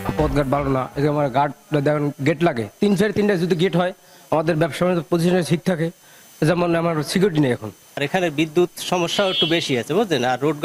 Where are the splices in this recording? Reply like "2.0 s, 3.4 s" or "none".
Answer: none